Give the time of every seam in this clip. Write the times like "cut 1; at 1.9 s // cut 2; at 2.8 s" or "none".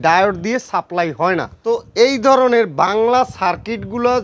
cut 1; at 1.5 s